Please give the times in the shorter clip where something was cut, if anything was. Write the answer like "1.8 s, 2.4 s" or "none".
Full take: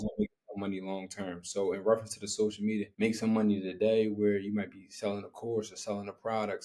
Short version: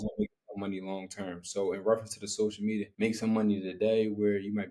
none